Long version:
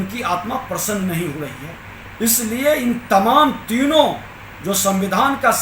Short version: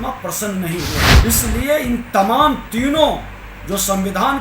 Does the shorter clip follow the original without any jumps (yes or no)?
no